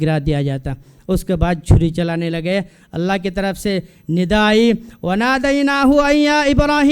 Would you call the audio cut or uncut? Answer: uncut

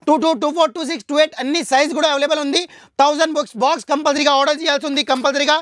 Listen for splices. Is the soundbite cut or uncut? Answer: uncut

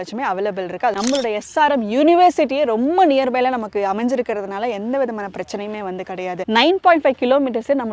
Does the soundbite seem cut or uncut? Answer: cut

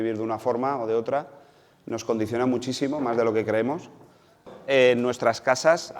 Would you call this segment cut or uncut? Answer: cut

